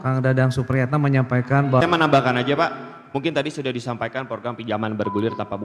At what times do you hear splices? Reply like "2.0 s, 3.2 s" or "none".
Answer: 1.8 s